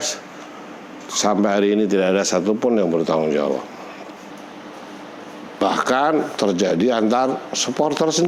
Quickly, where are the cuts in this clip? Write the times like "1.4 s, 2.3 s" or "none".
4.3 s

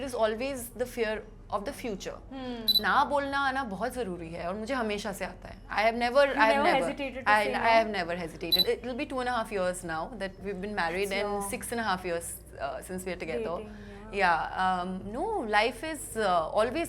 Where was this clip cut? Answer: 2.8 s, 8.6 s

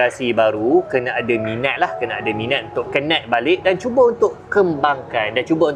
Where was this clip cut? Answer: none

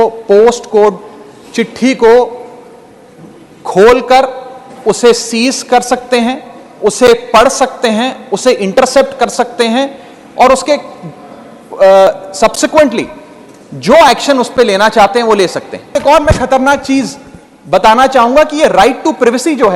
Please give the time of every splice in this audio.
16.0 s

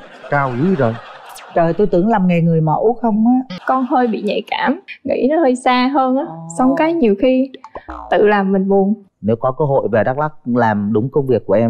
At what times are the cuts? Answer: 3.5 s, 4.9 s, 9.1 s

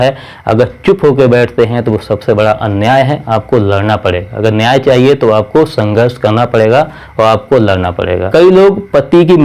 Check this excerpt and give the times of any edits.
8.2 s

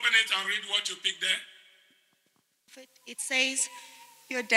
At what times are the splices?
2.7 s

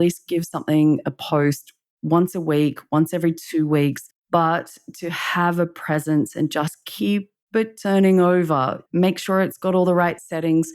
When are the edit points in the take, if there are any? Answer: 4.2 s, 8.8 s

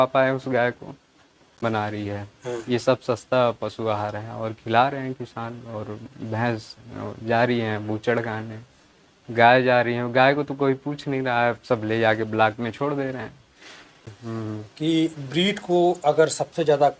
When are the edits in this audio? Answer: 1.6 s, 14.1 s

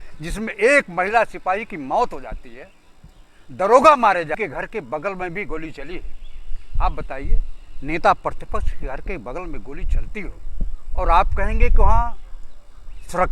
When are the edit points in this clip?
4.4 s

